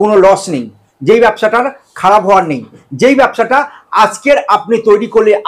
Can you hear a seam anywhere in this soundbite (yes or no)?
no